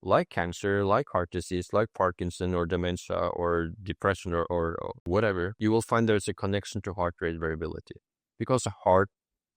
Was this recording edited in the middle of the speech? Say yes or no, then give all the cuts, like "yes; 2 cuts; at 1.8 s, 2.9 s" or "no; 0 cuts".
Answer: yes; 2 cuts; at 4.9 s, 5.5 s